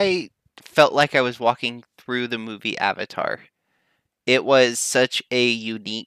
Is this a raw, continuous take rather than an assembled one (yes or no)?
yes